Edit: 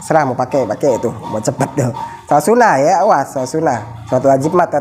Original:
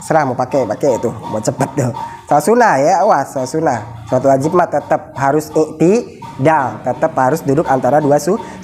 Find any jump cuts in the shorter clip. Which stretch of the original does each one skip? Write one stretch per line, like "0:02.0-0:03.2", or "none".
none